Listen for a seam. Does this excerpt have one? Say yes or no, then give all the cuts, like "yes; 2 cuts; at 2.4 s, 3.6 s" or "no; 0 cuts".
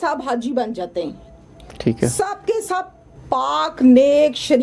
no; 0 cuts